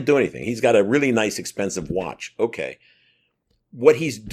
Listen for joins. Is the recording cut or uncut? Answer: uncut